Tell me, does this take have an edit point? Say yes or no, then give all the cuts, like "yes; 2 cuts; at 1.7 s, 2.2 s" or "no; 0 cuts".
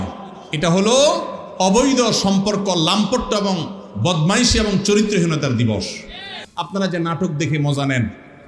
yes; 1 cut; at 6.4 s